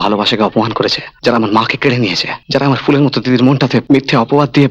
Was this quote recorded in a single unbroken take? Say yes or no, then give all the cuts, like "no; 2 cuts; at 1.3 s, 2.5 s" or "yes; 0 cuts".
no; 3 cuts; at 1.1 s, 2.3 s, 3.8 s